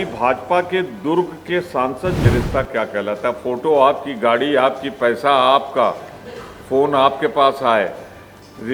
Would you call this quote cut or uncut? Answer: cut